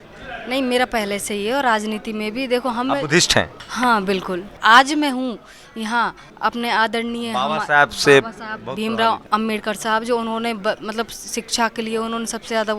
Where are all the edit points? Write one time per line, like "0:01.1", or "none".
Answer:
0:03.6
0:04.6
0:06.2
0:09.2